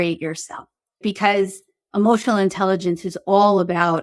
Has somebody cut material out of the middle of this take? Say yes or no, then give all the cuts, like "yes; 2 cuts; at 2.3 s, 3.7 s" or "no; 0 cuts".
yes; 1 cut; at 1.0 s